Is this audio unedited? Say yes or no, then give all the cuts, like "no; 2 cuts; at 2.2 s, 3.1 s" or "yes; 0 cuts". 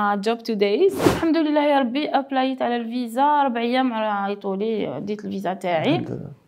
no; 1 cut; at 1.1 s